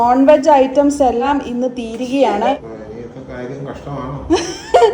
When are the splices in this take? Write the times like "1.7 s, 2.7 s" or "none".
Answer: 1.3 s, 2.6 s